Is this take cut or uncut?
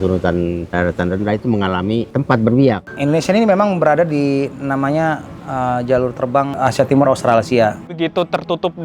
cut